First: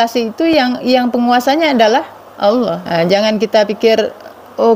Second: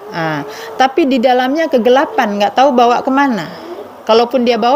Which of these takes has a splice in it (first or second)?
first